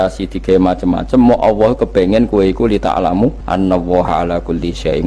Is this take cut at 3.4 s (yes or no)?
yes